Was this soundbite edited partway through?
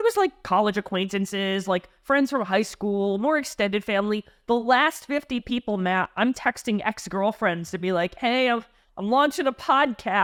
no; 0 cuts

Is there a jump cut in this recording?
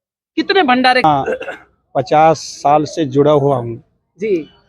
yes; 1 cut; at 1.0 s

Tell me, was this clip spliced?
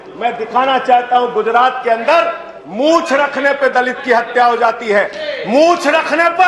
no; 0 cuts

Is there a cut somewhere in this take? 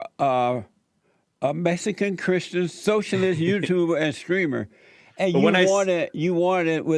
no; 0 cuts

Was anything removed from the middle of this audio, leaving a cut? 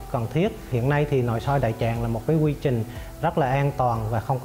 no; 0 cuts

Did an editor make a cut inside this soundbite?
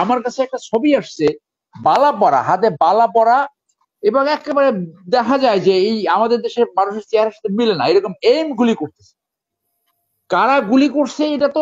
no; 0 cuts

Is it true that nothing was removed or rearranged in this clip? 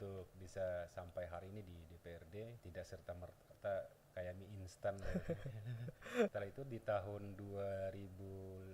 no; 2 cuts; at 2.6 s, 6.3 s

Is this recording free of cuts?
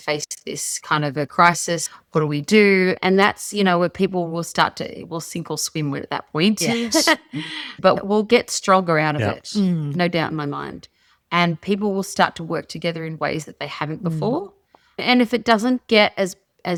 yes; 0 cuts

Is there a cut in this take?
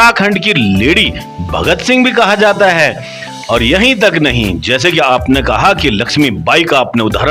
no; 0 cuts

